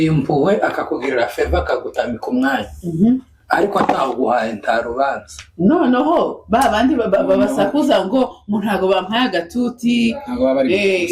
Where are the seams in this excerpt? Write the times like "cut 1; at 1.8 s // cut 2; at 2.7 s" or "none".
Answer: none